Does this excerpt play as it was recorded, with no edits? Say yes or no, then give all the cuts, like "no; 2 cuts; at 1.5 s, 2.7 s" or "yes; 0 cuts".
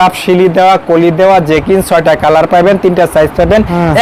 yes; 0 cuts